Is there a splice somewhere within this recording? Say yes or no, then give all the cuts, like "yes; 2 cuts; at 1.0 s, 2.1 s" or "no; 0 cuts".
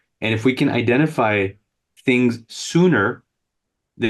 no; 0 cuts